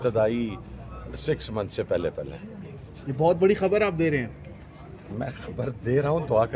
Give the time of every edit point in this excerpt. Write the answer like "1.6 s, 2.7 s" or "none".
none